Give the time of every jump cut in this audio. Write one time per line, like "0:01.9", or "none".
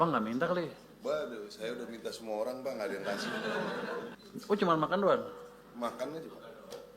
0:04.1